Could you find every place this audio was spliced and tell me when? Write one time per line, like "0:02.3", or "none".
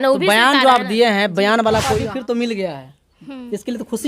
0:02.0